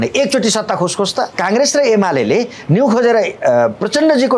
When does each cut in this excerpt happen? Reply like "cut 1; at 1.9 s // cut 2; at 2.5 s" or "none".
cut 1; at 1.3 s